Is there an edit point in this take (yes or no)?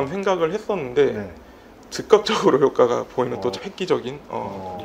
yes